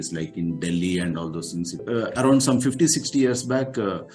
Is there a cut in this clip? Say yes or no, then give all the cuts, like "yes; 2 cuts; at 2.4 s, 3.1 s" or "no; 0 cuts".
yes; 1 cut; at 1.8 s